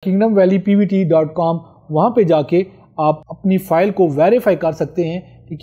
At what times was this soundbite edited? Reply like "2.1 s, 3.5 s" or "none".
none

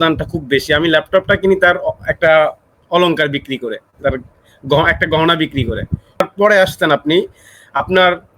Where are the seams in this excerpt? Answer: 6.2 s

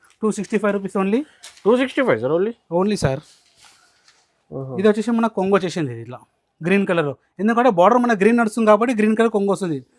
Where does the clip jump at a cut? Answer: none

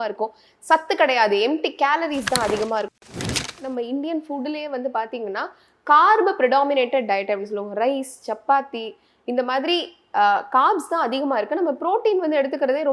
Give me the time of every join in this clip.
3.3 s

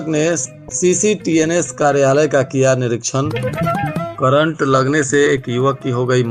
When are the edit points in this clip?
none

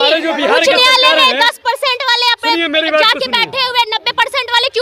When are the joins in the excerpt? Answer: none

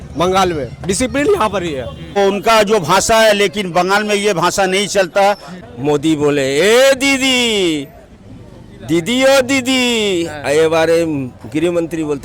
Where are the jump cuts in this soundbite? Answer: 2.2 s, 5.5 s

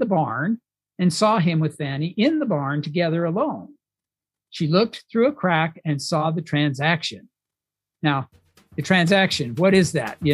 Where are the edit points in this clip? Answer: 6.2 s

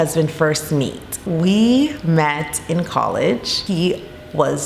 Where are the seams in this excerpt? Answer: 1.2 s, 3.5 s

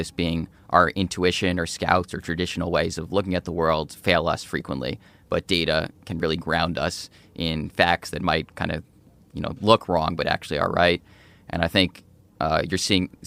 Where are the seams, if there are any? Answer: none

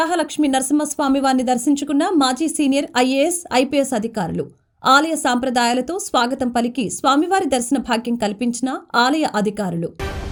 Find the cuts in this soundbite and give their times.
none

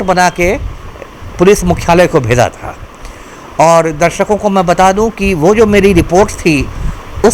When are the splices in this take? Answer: none

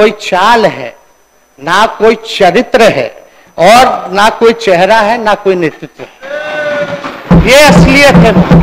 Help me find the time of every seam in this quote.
none

